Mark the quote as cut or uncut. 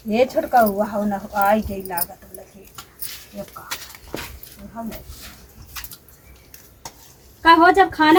uncut